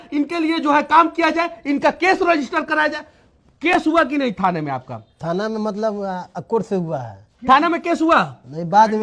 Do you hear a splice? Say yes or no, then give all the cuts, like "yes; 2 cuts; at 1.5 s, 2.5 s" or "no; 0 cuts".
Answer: no; 0 cuts